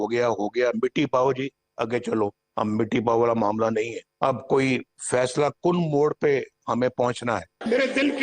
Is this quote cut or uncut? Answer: uncut